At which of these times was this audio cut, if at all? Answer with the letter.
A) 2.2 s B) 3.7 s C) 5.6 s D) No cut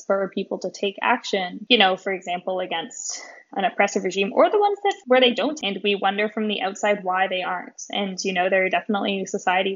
C